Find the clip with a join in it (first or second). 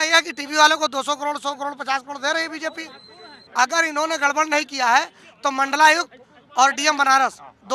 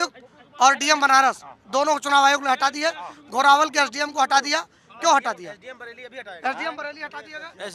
first